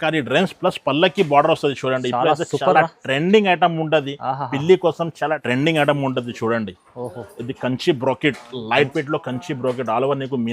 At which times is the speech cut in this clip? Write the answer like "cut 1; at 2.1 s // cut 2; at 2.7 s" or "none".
cut 1; at 5.4 s